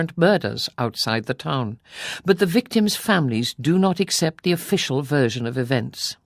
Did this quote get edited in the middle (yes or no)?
no